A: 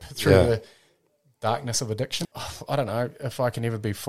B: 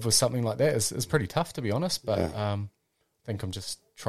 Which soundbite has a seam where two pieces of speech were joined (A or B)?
A